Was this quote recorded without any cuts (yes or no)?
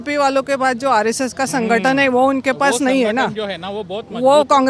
yes